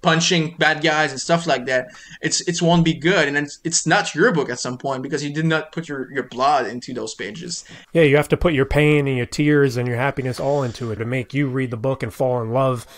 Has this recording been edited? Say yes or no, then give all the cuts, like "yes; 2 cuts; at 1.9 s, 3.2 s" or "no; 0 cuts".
yes; 1 cut; at 11.0 s